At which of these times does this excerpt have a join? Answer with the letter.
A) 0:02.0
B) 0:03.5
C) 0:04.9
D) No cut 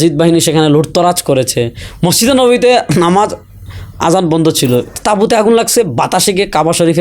C